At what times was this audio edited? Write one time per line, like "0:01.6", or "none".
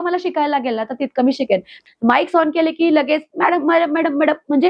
0:01.7